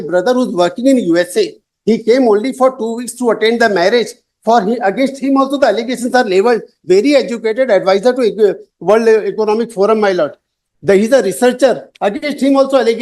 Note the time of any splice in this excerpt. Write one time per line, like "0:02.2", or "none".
none